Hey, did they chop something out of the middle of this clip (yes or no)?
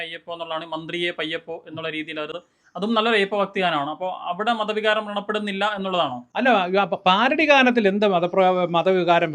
yes